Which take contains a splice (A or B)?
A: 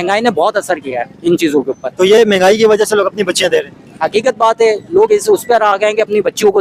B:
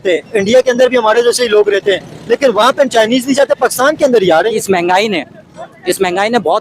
B